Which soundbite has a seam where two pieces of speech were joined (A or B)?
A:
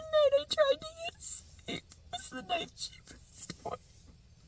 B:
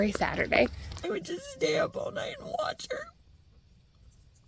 B